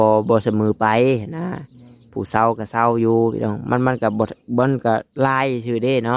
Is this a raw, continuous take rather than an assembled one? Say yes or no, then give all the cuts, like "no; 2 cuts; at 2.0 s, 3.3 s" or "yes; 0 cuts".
yes; 0 cuts